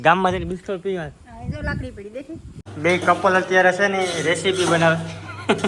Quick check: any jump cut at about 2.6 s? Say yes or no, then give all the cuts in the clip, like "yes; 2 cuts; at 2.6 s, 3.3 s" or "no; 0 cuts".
yes; 1 cut; at 2.6 s